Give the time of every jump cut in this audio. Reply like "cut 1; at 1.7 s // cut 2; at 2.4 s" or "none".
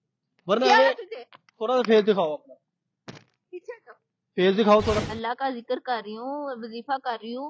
cut 1; at 5.1 s

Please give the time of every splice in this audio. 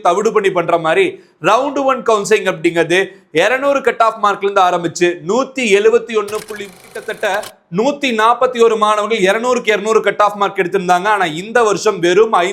cut 1; at 6.8 s

